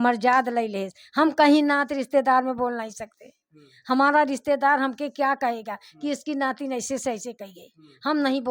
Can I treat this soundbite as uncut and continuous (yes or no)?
yes